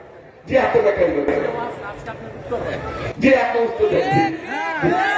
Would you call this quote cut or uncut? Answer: uncut